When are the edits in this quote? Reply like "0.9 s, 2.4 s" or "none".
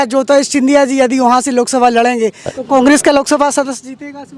2.5 s